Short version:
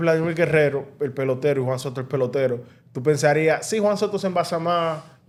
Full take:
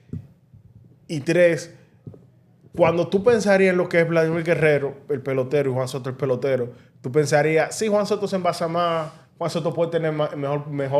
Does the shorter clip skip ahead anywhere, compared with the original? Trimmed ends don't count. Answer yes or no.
no